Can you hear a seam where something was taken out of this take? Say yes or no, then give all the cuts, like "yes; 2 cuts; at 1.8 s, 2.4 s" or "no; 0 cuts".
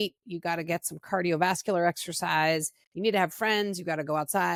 no; 0 cuts